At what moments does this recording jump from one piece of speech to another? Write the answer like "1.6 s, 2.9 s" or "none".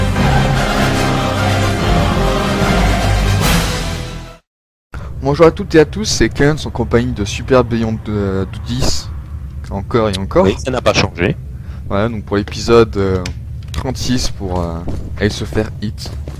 7.2 s